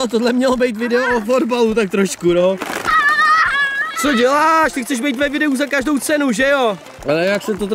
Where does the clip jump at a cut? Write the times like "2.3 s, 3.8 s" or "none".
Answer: 2.6 s, 7.0 s

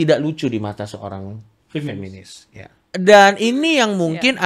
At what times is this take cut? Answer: 3.0 s

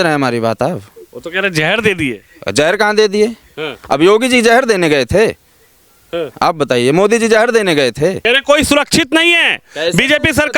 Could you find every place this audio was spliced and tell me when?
8.2 s

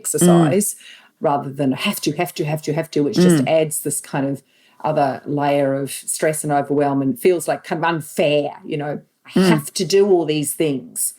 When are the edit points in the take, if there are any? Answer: 1.0 s

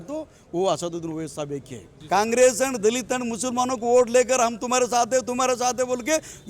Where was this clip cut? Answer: 1.9 s

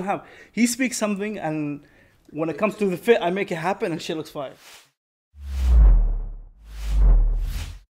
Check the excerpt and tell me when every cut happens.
4.7 s

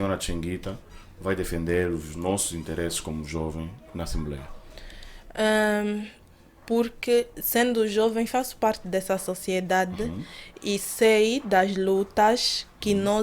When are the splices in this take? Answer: none

